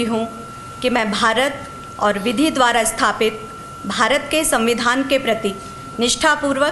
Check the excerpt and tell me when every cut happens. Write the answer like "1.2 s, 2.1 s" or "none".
none